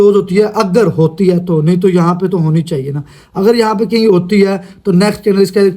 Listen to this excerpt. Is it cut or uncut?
uncut